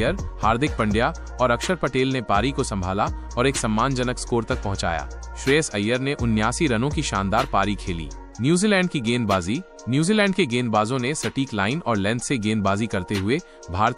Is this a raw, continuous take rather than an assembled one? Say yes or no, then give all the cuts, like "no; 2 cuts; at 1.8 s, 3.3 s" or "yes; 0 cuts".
yes; 0 cuts